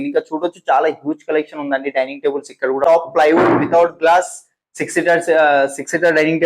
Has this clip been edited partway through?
yes; 1 cut; at 2.8 s

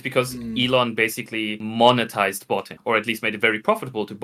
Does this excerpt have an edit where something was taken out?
no; 0 cuts

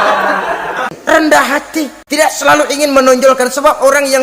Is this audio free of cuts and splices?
no; 2 cuts; at 0.9 s, 2.0 s

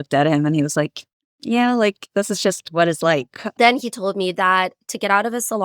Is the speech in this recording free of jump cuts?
no; 1 cut; at 3.4 s

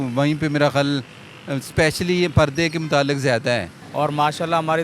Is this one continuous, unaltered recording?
no; 1 cut; at 3.8 s

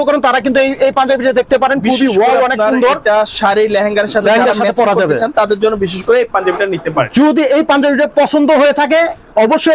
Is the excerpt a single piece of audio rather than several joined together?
yes; 0 cuts

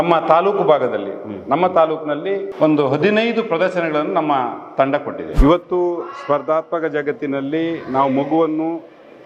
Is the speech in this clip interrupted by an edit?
yes; 1 cut; at 5.3 s

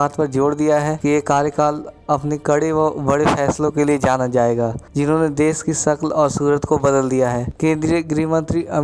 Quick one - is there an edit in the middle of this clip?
yes; 3 cuts; at 1.0 s, 4.8 s, 7.5 s

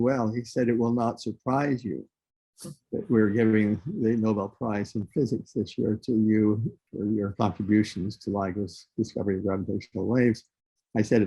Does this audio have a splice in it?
yes; 1 cut; at 6.8 s

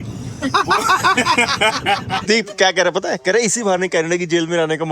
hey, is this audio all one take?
no; 1 cut; at 2.2 s

